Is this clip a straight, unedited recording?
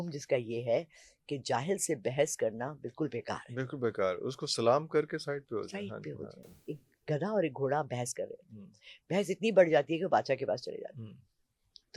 no; 1 cut; at 6.4 s

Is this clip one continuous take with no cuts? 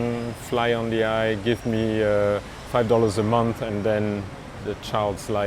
no; 2 cuts; at 2.5 s, 4.6 s

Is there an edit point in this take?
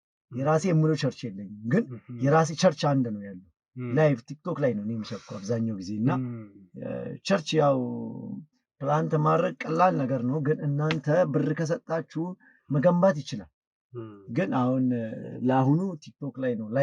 no; 0 cuts

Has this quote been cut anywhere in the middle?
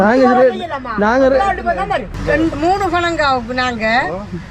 yes; 1 cut; at 2.1 s

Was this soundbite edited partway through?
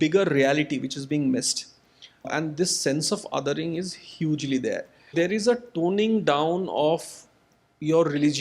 yes; 2 cuts; at 2.3 s, 5.1 s

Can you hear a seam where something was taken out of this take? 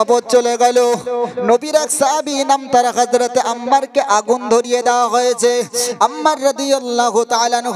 no; 0 cuts

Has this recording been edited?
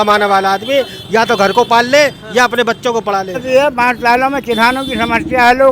yes; 1 cut; at 3.4 s

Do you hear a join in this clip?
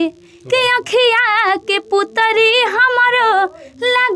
no; 0 cuts

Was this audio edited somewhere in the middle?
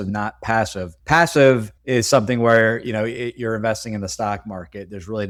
no; 0 cuts

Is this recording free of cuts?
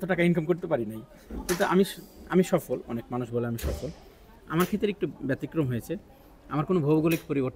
yes; 0 cuts

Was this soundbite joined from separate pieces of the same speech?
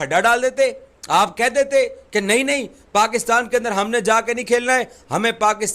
yes; 1 cut; at 1.4 s

